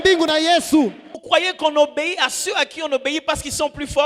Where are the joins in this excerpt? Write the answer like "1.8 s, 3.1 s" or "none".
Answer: 1.2 s